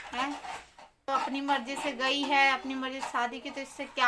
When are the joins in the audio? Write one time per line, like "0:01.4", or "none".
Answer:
0:01.1